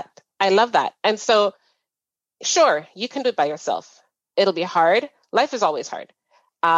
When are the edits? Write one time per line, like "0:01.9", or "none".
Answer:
0:01.9

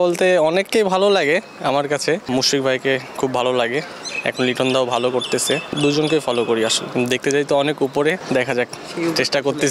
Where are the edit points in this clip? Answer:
0:02.2
0:05.7
0:06.8
0:08.2

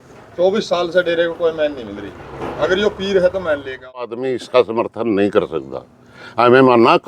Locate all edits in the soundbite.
0:04.2

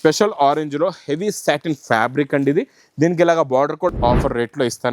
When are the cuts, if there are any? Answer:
0:03.9

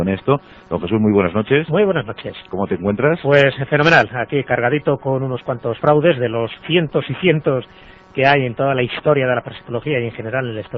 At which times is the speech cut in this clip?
none

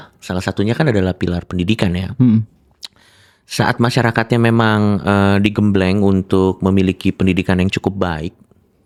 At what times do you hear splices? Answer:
none

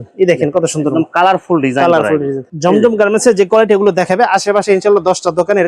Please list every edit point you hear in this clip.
0:02.4

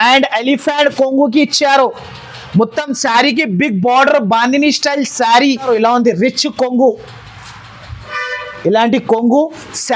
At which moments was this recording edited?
0:05.6

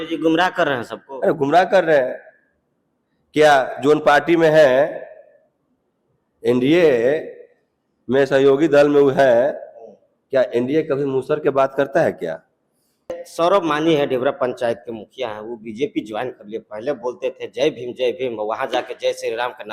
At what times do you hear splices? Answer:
0:13.2

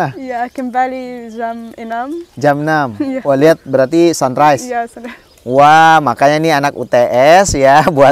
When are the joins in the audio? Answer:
none

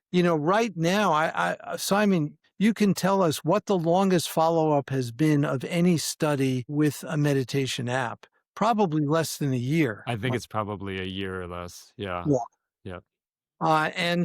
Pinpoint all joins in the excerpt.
0:02.4
0:06.7

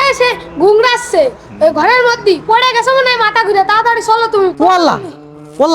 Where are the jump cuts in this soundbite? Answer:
0:04.6

